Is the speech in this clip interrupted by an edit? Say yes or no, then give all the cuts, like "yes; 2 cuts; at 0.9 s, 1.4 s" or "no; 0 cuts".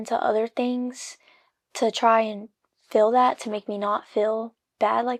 no; 0 cuts